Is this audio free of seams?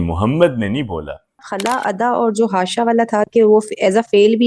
no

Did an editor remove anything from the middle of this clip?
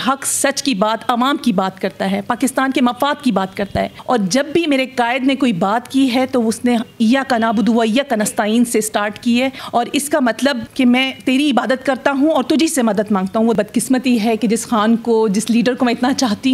yes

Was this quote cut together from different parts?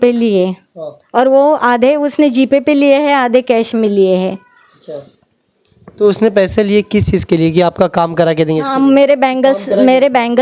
no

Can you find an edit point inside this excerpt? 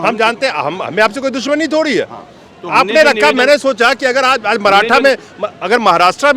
no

